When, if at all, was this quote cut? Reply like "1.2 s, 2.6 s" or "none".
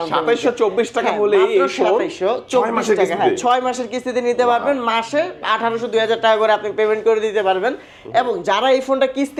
none